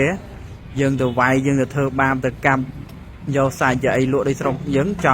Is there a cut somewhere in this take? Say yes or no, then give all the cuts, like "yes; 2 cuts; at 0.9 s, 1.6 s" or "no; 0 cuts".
no; 0 cuts